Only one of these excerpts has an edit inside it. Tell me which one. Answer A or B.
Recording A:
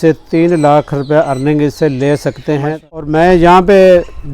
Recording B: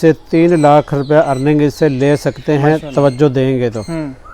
A